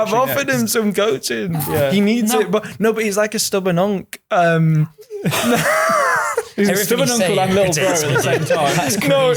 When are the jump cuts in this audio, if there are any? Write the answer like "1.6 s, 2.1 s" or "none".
none